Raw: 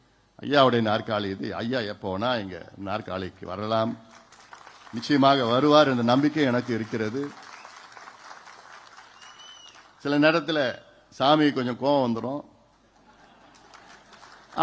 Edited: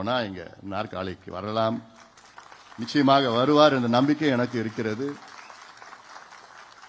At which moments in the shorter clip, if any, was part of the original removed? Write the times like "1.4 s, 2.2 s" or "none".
none